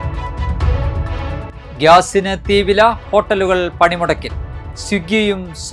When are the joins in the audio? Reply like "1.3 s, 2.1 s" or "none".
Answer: none